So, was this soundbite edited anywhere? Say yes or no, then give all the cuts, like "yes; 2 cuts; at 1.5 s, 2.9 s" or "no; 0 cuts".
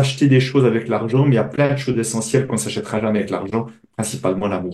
no; 0 cuts